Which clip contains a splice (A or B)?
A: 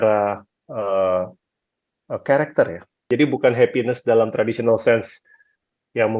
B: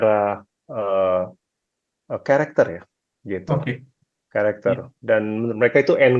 A